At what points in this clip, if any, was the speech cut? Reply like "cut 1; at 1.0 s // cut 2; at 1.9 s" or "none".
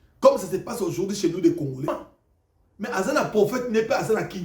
cut 1; at 1.9 s